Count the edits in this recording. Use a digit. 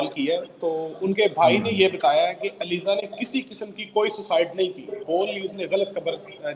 0